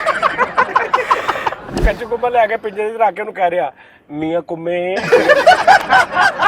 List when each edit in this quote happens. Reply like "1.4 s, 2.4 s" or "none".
1.7 s